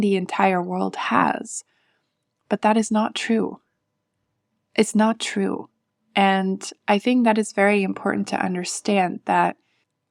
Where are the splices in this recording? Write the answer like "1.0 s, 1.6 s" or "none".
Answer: none